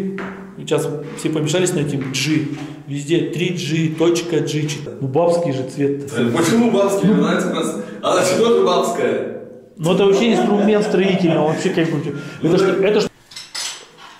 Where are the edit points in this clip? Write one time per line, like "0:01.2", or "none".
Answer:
0:04.8
0:13.1